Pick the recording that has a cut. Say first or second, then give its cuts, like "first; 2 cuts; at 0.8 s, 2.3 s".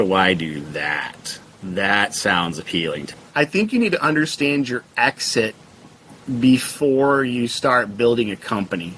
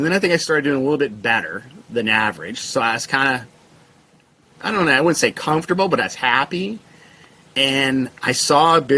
first; 1 cut; at 3.1 s